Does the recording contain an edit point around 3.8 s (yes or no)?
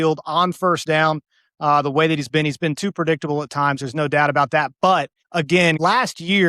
no